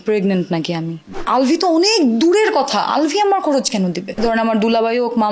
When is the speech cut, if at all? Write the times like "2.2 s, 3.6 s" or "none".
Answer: 1.1 s, 4.2 s